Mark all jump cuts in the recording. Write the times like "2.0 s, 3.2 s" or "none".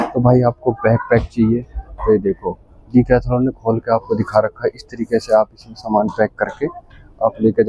none